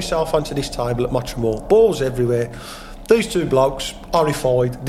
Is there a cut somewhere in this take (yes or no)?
no